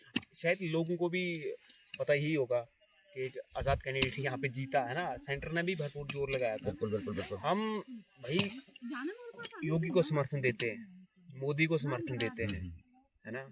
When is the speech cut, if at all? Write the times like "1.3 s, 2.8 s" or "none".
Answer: none